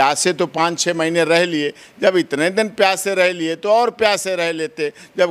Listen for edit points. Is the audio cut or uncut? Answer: uncut